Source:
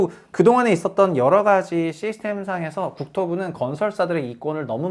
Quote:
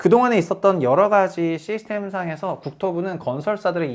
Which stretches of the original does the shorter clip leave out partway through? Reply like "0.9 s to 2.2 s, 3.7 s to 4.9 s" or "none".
none

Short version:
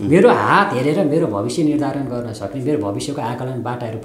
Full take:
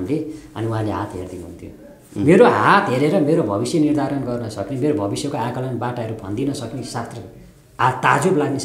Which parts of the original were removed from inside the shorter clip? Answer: none

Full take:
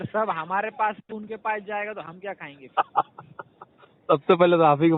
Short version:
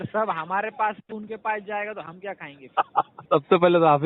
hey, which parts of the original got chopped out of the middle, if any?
3.2 s to 3.9 s

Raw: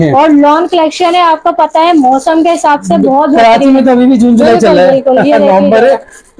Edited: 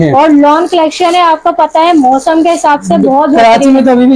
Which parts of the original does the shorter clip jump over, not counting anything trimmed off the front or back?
none

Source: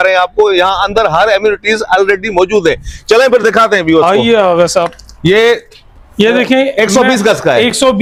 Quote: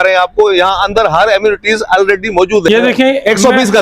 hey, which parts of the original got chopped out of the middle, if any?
2.7 s to 6.2 s

